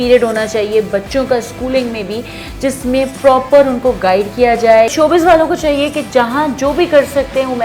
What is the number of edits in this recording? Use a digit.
1